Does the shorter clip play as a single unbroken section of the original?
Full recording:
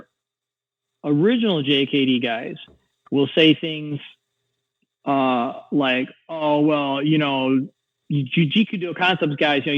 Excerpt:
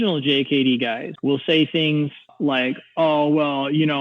no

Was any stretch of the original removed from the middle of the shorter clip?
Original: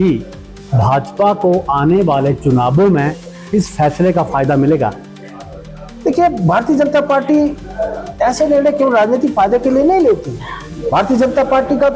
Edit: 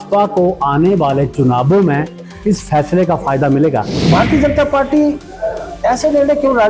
yes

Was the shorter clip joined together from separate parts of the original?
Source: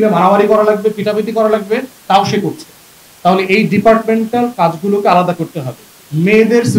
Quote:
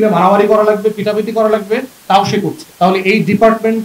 yes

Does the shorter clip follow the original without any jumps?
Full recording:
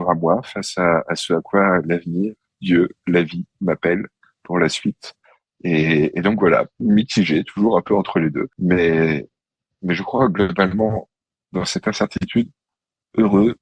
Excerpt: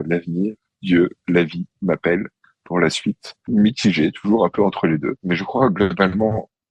no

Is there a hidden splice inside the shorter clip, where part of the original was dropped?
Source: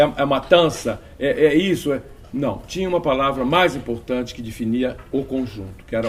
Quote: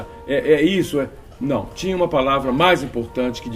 no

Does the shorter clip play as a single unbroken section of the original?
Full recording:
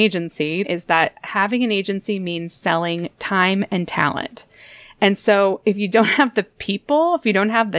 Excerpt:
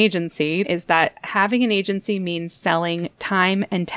yes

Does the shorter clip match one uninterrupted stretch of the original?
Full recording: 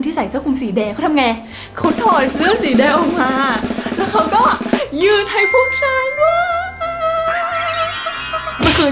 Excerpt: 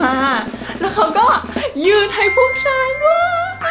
yes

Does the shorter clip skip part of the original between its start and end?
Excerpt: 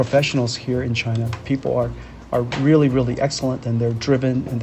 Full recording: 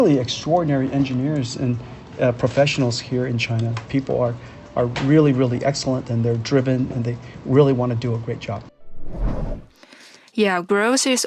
no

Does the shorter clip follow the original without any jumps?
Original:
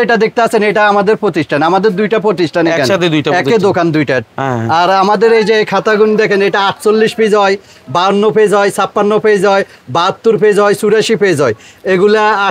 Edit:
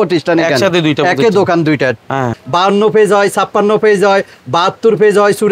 no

